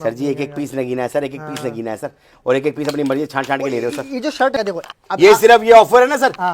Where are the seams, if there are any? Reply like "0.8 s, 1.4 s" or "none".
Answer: 4.6 s